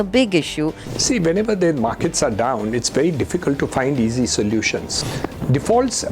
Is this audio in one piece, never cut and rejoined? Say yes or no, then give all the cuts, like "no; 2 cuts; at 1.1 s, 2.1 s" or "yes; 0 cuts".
no; 1 cut; at 5.0 s